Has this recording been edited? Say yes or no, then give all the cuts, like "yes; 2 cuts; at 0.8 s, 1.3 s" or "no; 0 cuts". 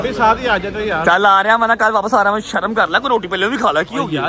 no; 0 cuts